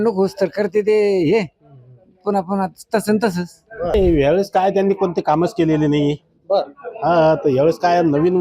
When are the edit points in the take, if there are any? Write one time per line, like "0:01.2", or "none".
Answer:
0:03.9

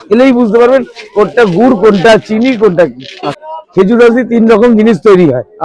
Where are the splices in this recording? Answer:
0:03.4

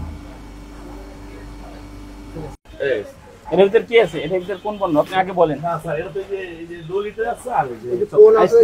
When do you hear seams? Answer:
none

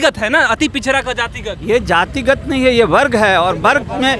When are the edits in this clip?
none

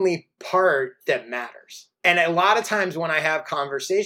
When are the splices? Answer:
0:01.8

